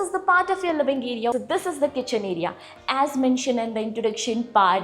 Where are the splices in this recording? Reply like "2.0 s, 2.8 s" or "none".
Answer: 1.3 s